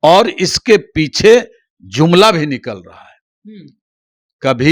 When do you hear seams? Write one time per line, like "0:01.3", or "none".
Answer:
none